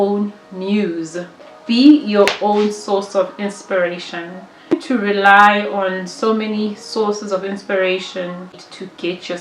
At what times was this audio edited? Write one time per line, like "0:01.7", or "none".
0:04.7
0:08.5